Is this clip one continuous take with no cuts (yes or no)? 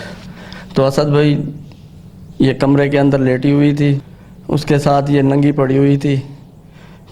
no